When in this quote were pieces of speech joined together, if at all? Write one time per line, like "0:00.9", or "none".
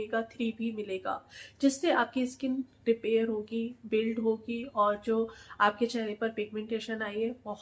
none